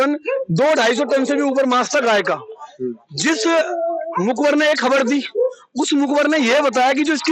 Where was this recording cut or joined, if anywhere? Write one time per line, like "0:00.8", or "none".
none